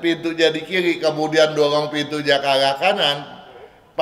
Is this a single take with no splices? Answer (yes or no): yes